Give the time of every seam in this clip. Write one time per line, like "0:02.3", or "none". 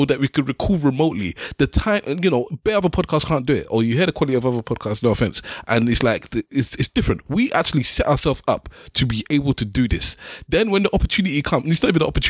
none